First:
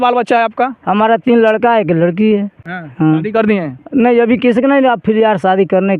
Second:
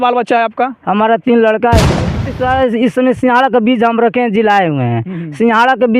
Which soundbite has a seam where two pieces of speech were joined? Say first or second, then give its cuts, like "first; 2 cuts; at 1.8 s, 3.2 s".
second; 1 cut; at 2.2 s